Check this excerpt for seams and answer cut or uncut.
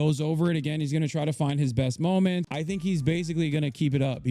cut